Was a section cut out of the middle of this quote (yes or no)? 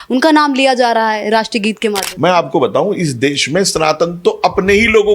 yes